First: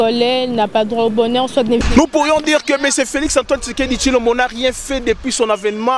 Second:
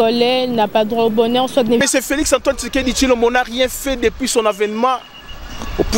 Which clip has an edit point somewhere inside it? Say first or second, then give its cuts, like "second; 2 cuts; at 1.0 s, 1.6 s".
second; 1 cut; at 1.9 s